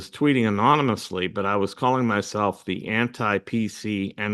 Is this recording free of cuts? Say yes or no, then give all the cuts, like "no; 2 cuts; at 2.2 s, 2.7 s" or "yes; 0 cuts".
yes; 0 cuts